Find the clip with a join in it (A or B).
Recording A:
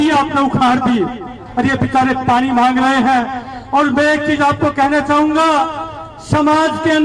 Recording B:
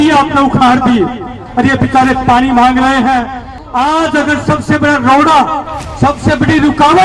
B